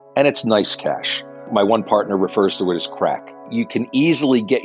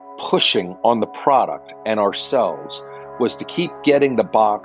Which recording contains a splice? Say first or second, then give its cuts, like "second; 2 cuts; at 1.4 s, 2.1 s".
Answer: first; 2 cuts; at 1.5 s, 3.5 s